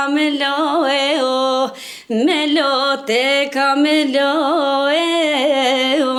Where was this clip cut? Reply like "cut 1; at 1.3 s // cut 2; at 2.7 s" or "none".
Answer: none